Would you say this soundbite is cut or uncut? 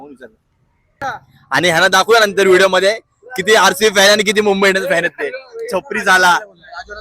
cut